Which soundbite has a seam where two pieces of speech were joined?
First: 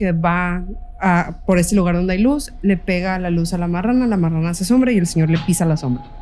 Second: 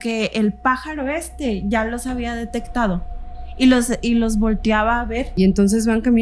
second; 1 cut; at 5.3 s

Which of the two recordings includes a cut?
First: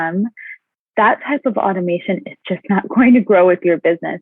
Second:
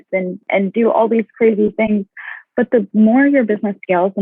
second; 1 cut; at 1.8 s

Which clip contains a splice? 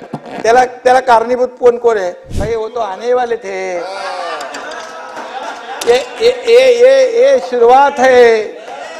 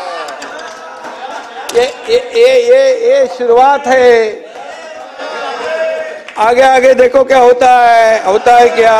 first; 1 cut; at 2.3 s

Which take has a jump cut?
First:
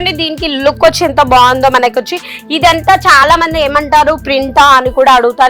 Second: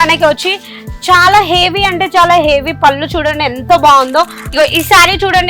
second; 1 cut; at 4.4 s

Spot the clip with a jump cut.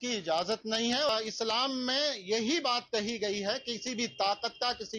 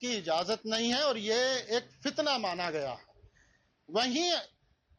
first; 1 cut; at 1.1 s

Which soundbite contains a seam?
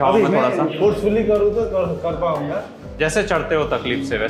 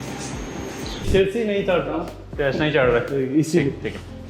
second; 1 cut; at 1.1 s

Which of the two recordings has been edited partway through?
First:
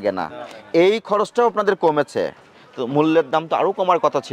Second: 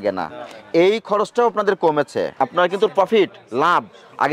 second; 1 cut; at 2.3 s

